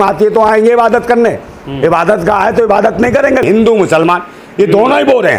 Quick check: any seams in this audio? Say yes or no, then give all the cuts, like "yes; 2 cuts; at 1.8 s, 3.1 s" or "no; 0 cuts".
yes; 1 cut; at 3.4 s